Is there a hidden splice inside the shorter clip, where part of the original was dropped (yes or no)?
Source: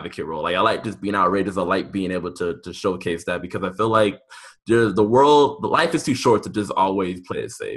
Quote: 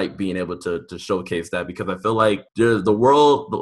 yes